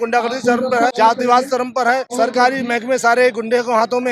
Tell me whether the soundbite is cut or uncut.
cut